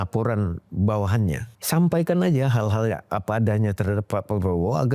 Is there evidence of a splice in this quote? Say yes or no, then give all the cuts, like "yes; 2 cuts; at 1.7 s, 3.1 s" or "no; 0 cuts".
yes; 1 cut; at 1.5 s